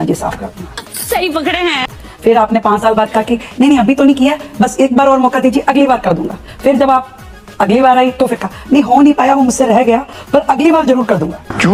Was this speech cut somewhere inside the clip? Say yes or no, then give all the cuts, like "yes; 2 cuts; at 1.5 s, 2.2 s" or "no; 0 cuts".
no; 0 cuts